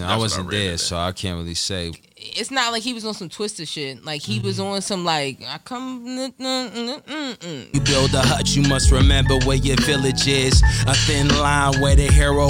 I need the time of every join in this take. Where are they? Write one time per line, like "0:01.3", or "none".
0:01.9
0:07.7